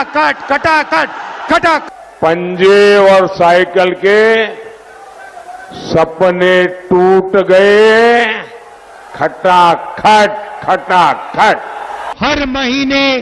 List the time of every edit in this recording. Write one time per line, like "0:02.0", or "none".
0:01.9
0:12.1